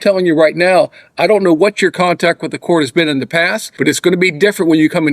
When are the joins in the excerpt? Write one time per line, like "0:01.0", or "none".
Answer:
0:03.6